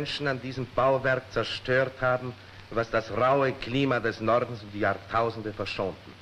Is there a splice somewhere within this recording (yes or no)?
no